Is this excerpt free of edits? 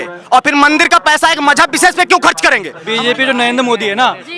no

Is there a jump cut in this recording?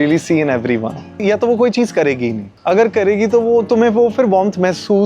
yes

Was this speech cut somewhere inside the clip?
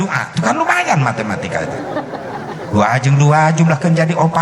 no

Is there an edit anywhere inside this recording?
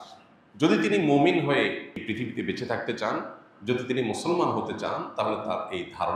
yes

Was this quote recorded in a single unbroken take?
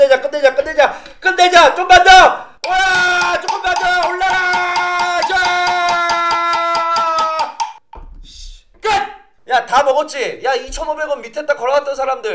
no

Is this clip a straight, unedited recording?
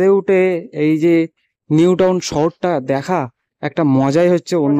yes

